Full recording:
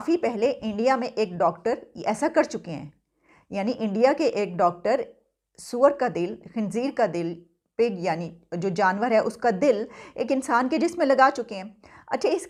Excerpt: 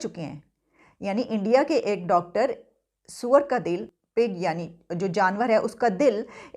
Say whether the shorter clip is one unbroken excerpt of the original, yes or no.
no